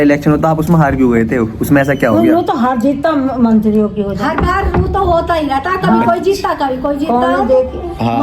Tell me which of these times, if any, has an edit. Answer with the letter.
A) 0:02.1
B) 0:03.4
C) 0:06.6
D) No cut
D